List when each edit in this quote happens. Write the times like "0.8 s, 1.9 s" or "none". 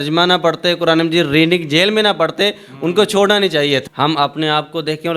3.8 s